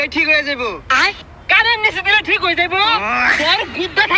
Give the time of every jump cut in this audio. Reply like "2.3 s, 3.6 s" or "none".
1.1 s